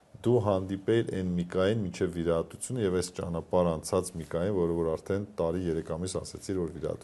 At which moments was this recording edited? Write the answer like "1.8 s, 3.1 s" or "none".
none